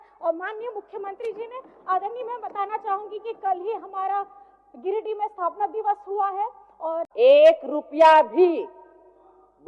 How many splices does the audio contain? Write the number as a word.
one